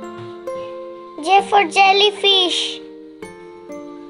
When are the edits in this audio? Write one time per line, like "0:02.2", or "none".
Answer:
0:01.2
0:02.5